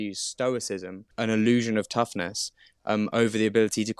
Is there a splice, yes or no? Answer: yes